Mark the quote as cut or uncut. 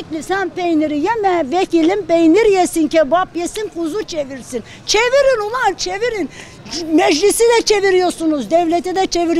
uncut